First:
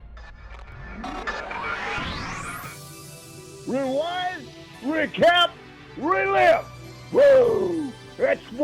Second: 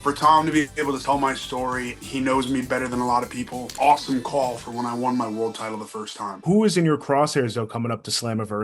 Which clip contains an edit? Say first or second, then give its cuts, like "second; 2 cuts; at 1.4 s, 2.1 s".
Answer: second; 4 cuts; at 1.0 s, 2.0 s, 3.7 s, 6.4 s